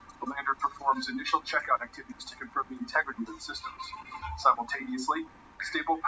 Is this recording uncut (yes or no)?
no